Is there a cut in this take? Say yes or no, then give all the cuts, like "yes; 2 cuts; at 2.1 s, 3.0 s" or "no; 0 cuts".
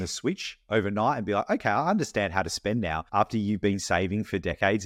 yes; 1 cut; at 3.0 s